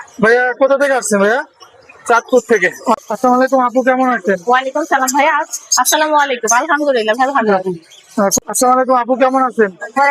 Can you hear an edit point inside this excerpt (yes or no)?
yes